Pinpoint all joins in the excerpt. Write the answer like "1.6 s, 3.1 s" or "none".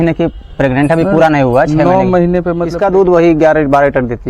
2.7 s